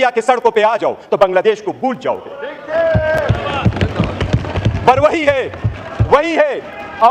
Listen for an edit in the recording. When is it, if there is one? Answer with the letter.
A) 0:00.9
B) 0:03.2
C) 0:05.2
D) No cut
D